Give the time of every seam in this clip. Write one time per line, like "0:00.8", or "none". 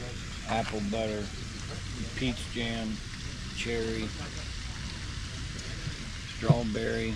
none